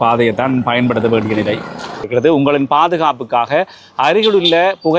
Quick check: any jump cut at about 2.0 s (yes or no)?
yes